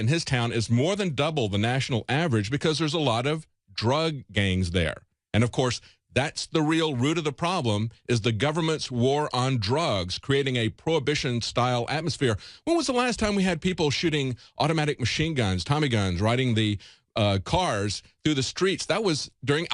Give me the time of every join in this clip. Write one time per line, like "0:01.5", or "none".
none